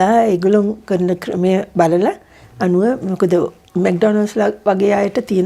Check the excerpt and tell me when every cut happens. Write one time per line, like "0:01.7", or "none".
none